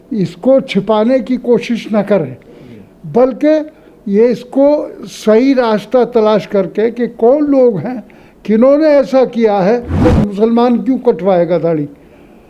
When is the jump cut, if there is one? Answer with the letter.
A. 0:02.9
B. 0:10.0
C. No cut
B